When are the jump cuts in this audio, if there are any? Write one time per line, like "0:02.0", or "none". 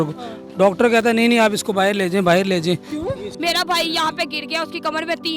0:03.3